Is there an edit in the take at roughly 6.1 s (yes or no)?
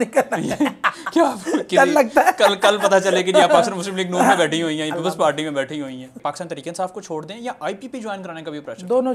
yes